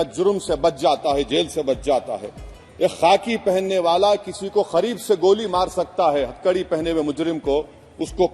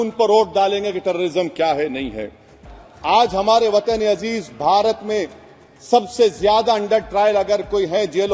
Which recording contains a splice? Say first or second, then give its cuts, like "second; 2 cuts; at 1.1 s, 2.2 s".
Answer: second; 1 cut; at 2.7 s